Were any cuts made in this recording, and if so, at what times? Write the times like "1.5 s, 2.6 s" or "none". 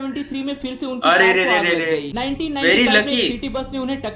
2.1 s

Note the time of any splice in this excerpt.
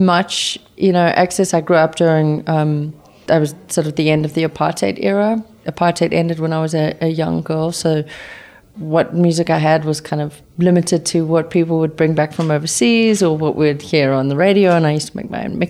none

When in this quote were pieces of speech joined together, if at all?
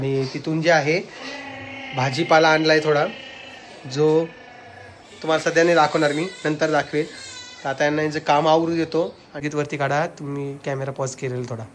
9.4 s

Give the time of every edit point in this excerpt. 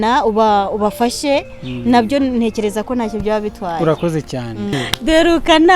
4.8 s

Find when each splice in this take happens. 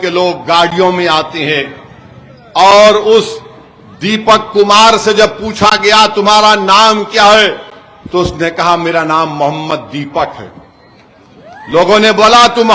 none

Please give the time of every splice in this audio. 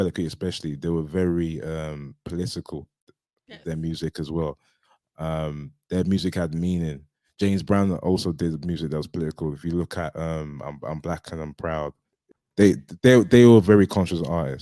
12.3 s

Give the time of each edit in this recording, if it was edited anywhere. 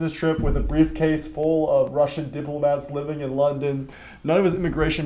1.9 s

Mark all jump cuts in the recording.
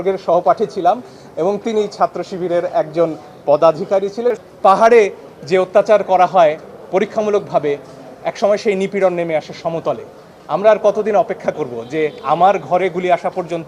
4.3 s

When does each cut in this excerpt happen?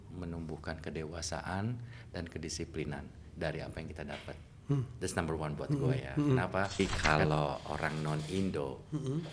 6.8 s

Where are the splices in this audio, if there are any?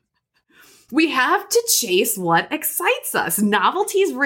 none

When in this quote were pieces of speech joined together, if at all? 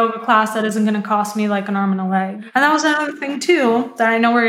2.4 s

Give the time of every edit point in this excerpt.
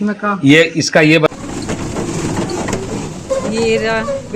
1.3 s

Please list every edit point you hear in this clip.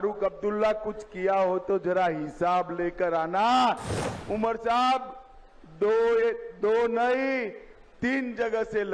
3.9 s

